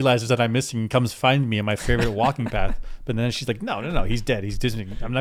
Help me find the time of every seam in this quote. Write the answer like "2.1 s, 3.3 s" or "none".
none

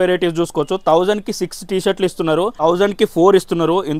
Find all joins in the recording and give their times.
2.6 s

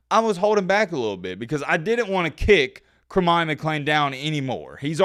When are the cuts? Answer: none

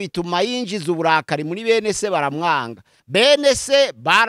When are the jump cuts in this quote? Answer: 3.0 s

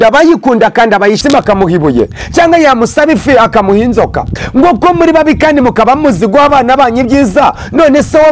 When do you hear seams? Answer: 1.2 s

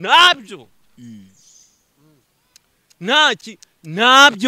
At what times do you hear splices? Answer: none

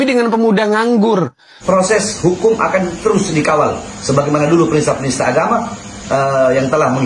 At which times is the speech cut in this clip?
1.5 s

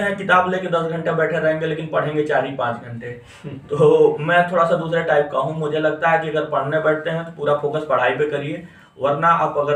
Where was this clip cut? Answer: none

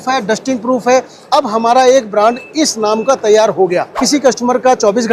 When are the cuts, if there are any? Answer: 3.9 s

